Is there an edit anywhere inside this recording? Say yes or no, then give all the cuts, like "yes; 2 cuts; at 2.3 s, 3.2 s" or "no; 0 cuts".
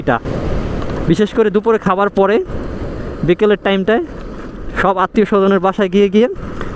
no; 0 cuts